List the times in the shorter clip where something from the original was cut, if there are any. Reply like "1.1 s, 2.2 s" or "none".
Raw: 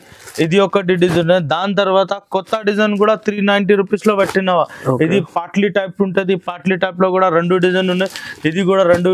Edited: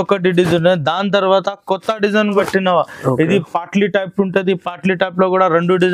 2.4 s